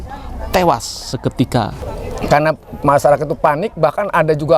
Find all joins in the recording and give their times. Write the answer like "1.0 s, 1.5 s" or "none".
1.8 s